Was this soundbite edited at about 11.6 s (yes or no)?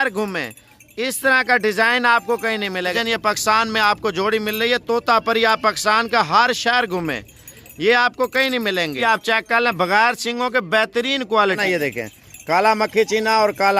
yes